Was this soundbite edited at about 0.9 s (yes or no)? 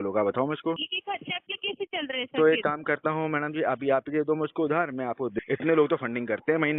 yes